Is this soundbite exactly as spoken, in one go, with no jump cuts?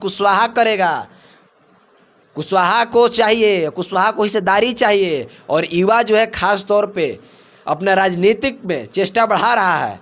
yes; 0 cuts

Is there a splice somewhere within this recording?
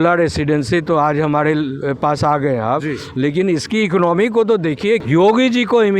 yes; 1 cut; at 5.0 s

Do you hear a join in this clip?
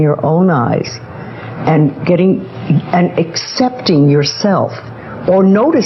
no; 0 cuts

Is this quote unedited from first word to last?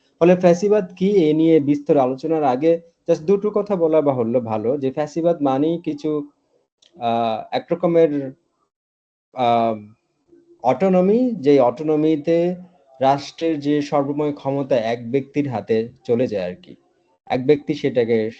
yes; 0 cuts

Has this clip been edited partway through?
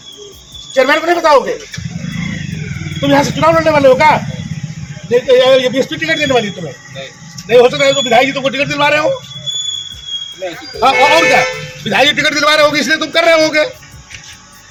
no; 0 cuts

